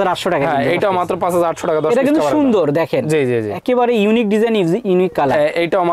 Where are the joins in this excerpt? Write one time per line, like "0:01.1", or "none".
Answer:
none